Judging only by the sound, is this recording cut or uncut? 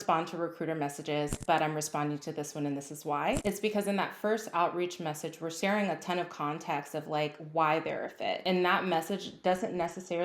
cut